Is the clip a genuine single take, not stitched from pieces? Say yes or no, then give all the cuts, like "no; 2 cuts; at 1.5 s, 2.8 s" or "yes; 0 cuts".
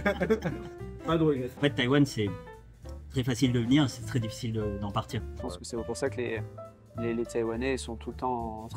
no; 2 cuts; at 1.5 s, 5.3 s